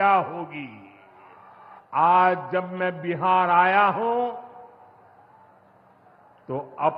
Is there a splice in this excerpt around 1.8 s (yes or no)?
yes